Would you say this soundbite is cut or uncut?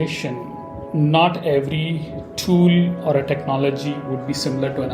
uncut